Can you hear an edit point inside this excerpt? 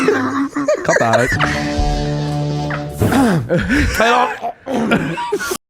yes; 1 cut; at 3.0 s

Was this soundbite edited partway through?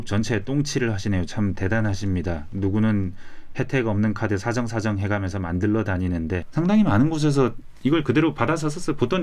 yes; 1 cut; at 6.4 s

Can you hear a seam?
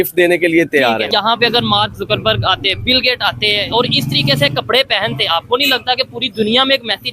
yes; 1 cut; at 1.1 s

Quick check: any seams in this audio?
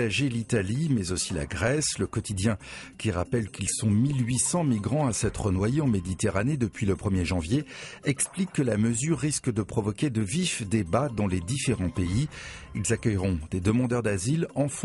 yes; 1 cut; at 5.5 s

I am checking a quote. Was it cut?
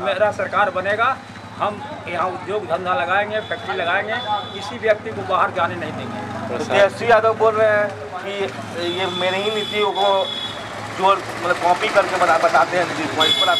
no; 0 cuts

